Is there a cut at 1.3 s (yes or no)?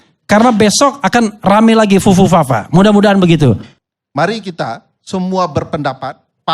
no